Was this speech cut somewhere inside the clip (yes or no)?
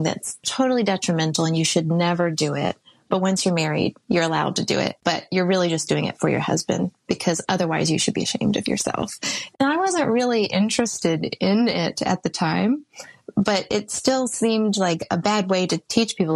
no